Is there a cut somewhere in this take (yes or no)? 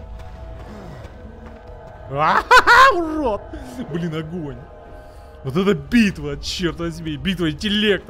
no